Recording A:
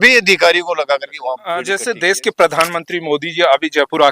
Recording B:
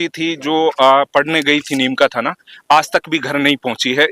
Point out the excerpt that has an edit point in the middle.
A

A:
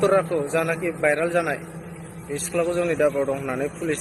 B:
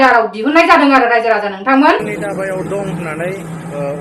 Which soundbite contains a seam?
B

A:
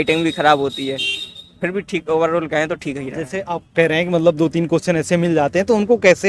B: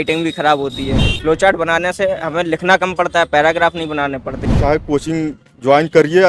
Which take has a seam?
B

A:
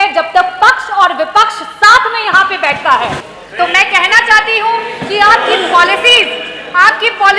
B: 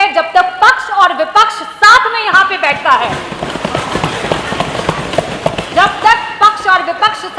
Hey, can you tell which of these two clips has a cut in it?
A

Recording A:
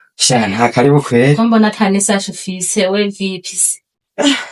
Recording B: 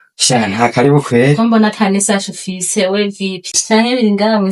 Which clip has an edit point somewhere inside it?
B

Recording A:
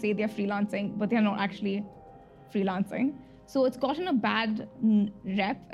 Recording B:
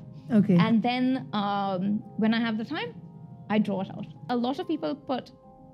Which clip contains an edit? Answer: B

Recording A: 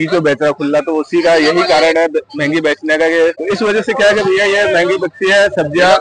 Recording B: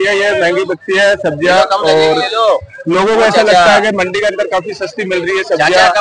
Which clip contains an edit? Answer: A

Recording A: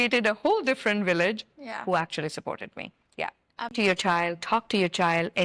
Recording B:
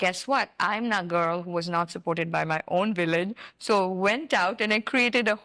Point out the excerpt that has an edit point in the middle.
A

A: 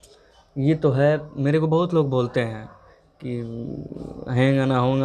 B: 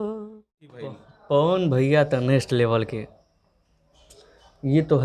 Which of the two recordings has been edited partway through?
B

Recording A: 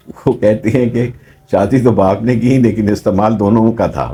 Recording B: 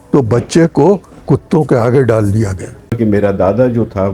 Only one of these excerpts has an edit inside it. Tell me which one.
B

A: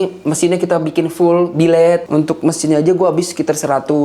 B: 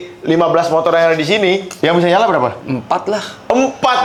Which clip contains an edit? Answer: A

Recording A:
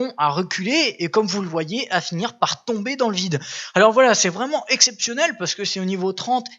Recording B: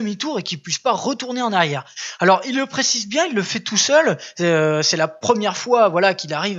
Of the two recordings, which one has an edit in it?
A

